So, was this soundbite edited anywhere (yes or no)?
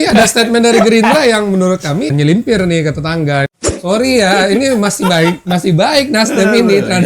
yes